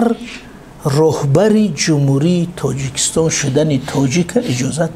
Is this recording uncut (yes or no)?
yes